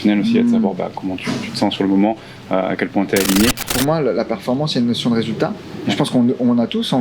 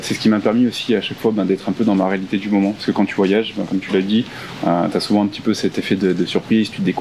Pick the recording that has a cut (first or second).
first